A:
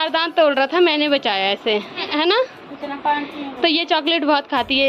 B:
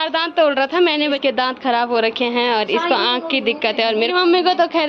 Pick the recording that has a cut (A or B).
B